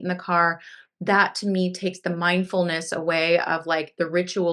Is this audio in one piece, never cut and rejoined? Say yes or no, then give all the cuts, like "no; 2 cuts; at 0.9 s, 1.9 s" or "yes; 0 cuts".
yes; 0 cuts